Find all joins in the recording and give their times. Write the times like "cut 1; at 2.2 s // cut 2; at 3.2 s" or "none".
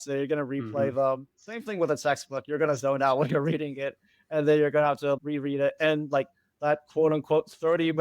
cut 1; at 5.2 s